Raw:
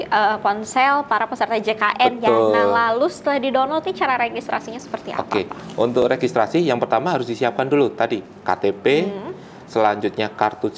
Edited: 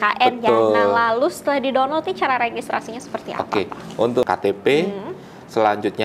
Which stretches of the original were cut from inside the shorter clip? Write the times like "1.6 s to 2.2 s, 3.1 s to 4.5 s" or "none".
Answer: 6.0 s to 8.4 s

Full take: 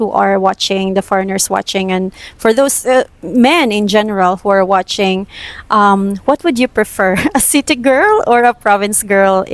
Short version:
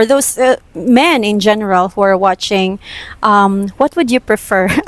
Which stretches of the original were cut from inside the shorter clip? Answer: none

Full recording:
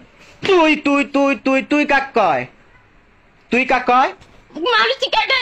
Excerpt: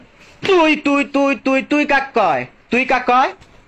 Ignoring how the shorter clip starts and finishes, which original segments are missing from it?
2.5 s to 3.3 s

